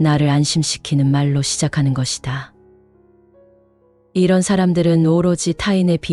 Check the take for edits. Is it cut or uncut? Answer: cut